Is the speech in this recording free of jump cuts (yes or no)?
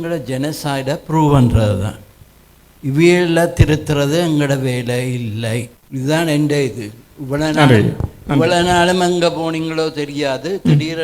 no